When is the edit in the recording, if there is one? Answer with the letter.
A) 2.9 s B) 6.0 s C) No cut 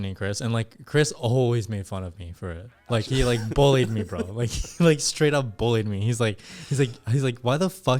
C